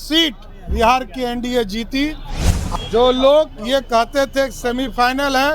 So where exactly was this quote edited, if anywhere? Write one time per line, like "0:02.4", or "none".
0:02.5

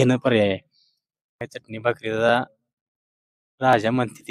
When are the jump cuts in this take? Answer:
0:01.4

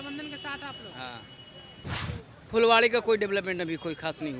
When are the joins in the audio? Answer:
0:01.8

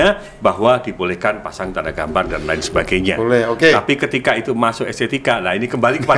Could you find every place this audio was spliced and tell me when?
none

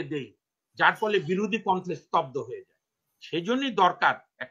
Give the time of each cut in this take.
none

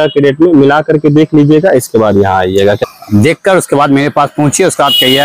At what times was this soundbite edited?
0:02.8

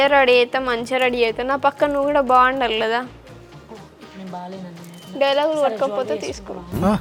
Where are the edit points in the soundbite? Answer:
none

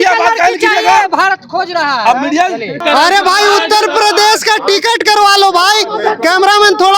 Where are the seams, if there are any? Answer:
0:02.8

